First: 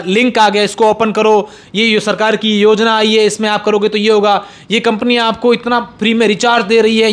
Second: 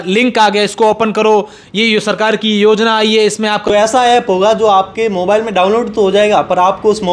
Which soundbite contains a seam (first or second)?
second